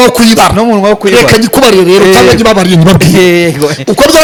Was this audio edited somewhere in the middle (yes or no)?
no